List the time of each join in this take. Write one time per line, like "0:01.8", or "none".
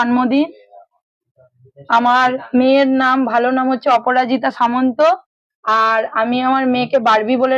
0:06.6